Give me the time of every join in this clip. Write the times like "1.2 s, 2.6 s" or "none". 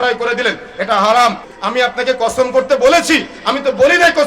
1.4 s